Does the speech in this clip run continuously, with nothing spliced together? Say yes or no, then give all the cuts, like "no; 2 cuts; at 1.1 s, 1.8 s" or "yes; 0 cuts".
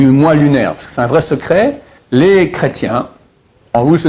no; 1 cut; at 1.9 s